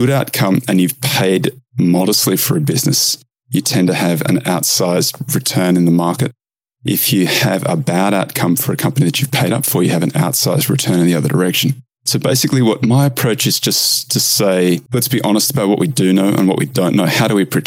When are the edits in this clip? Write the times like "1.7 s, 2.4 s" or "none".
14.8 s